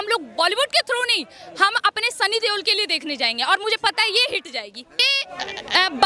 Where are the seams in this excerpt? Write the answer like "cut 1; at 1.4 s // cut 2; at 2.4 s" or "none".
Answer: cut 1; at 5.1 s